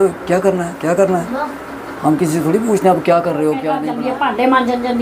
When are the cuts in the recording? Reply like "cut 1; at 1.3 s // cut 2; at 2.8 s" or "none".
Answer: cut 1; at 3.8 s